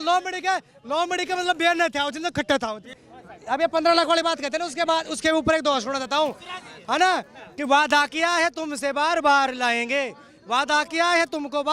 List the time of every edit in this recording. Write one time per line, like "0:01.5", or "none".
0:03.0